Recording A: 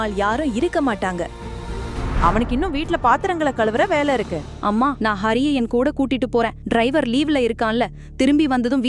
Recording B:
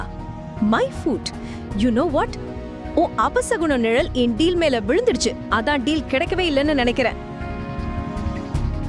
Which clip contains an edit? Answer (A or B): A